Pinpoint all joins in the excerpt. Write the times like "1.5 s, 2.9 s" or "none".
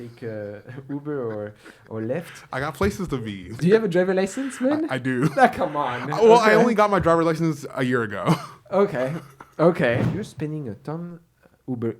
3.6 s, 10.1 s